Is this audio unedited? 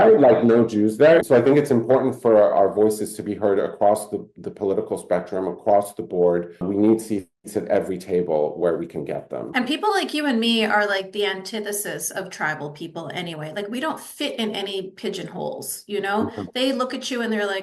no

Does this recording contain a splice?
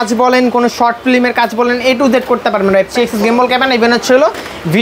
yes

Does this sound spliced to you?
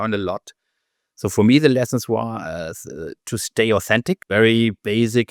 yes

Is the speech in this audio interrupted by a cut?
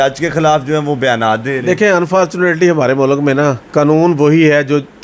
yes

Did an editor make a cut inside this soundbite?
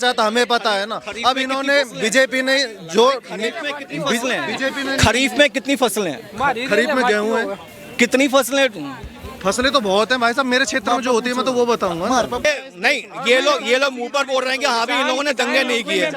yes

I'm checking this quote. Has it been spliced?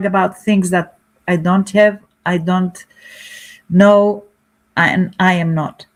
no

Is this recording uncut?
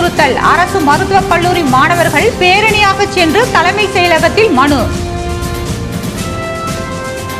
no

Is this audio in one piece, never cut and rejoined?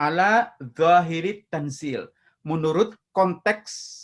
no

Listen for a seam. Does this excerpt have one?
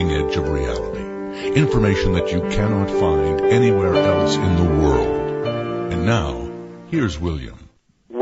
no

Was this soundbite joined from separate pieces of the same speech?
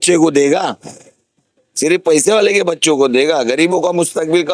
no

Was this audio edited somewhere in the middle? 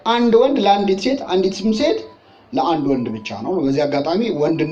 no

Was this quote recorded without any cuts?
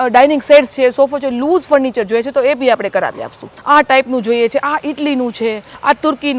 no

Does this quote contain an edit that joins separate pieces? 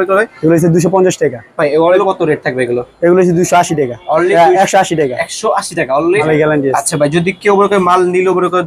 yes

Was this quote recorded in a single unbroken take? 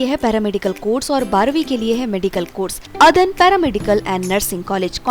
no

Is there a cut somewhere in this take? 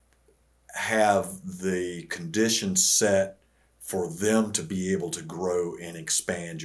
no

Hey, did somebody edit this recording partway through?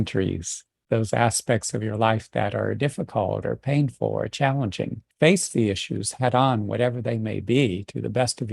yes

